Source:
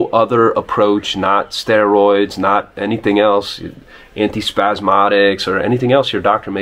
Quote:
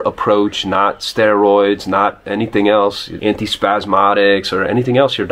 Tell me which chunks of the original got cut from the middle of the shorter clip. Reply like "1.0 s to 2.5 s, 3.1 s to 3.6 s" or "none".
3.6 s to 4.0 s